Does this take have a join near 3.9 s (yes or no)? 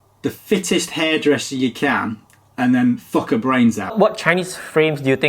yes